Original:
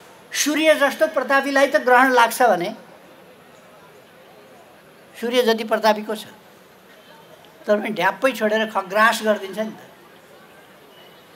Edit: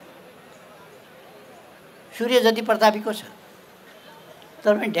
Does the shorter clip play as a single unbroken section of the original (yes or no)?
yes